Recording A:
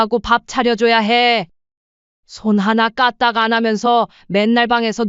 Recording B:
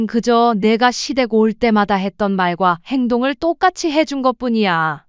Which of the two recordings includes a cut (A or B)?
A